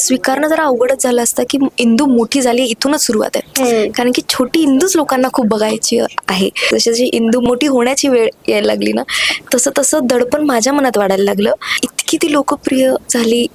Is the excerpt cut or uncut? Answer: cut